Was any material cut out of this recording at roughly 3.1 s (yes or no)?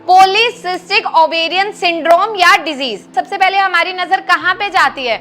yes